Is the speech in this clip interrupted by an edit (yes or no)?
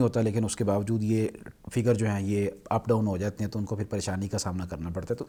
no